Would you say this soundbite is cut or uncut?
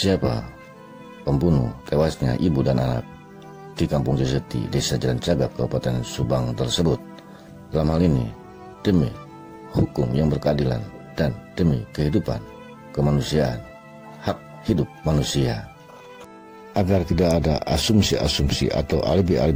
uncut